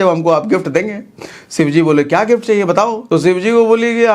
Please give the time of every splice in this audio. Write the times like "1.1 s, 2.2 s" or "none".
3.0 s